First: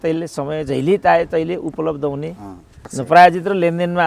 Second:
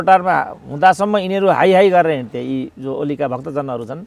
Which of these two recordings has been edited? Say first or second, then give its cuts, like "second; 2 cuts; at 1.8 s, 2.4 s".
first; 1 cut; at 2.9 s